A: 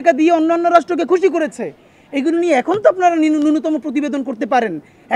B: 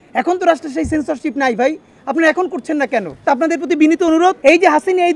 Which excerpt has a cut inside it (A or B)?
B